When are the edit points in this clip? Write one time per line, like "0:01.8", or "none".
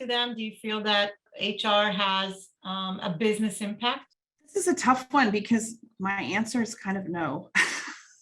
0:01.3